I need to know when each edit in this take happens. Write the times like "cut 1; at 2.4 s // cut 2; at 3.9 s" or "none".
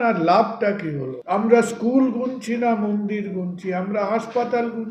cut 1; at 1.1 s